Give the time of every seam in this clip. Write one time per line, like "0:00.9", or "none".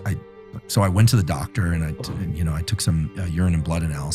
none